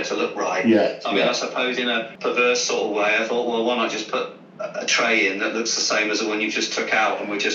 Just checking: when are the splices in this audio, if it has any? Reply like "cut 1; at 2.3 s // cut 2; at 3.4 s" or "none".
cut 1; at 2.1 s